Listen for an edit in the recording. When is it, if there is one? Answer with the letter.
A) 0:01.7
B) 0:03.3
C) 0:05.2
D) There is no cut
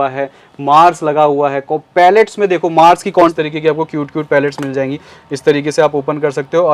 B